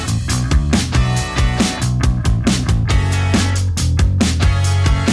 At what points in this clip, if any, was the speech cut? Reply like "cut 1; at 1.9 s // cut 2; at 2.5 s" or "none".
cut 1; at 2.0 s